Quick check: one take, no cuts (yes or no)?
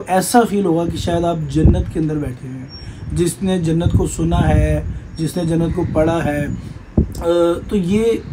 yes